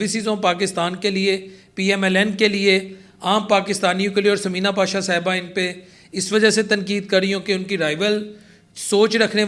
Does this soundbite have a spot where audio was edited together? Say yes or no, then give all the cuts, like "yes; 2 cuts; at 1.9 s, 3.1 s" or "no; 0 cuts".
no; 0 cuts